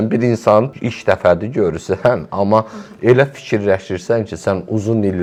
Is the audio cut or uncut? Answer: uncut